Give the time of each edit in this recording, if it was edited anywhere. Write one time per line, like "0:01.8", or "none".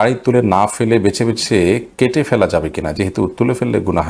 none